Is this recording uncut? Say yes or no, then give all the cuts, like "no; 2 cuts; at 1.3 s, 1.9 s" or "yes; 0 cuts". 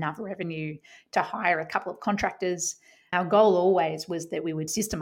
no; 1 cut; at 3.1 s